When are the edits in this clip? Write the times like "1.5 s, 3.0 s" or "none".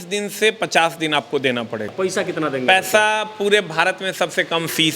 1.9 s